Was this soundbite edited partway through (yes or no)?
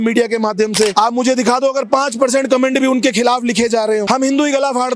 yes